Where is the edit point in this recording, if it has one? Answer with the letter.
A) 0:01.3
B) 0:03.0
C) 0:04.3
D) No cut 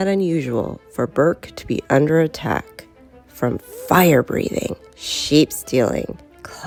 D